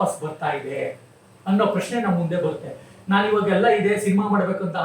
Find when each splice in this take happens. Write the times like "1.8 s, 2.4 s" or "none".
none